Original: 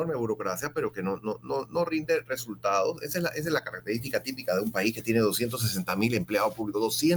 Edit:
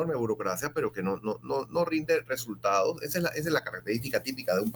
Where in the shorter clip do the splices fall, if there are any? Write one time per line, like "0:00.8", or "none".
none